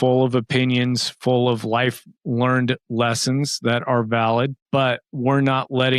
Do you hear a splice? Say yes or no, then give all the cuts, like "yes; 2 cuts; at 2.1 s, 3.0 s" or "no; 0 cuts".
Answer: no; 0 cuts